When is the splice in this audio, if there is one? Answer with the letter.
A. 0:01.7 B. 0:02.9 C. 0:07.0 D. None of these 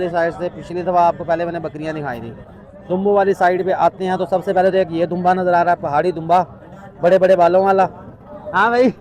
D